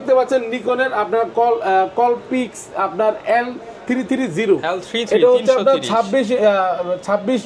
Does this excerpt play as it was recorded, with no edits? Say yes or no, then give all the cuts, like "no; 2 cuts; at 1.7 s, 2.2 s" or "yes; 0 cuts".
yes; 0 cuts